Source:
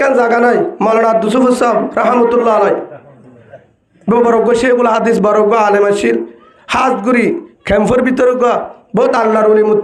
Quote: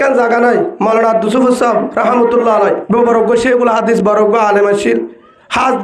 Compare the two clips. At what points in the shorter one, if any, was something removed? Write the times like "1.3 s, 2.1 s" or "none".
2.8 s